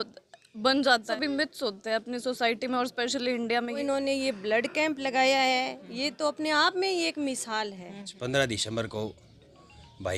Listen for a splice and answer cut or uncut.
cut